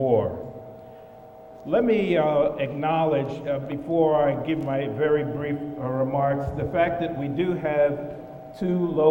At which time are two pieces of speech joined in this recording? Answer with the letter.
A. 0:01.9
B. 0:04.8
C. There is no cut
C